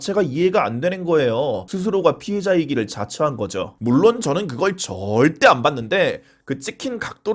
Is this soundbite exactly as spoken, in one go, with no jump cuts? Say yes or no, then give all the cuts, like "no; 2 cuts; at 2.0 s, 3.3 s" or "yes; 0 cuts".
no; 2 cuts; at 1.6 s, 3.8 s